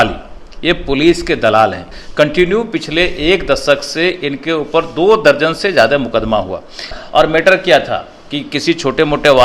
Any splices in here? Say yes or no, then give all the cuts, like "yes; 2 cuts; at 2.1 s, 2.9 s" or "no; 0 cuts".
yes; 2 cuts; at 1.9 s, 6.9 s